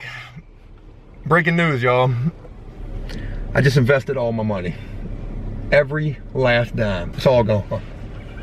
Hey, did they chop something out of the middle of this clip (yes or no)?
yes